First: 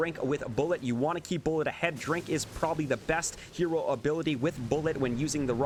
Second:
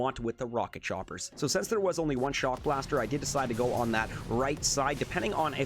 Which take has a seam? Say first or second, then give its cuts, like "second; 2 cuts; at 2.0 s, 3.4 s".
second; 1 cut; at 1.2 s